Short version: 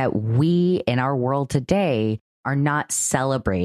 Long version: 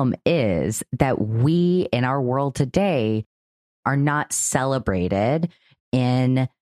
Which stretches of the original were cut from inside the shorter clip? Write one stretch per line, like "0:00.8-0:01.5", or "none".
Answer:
0:03.4-0:03.7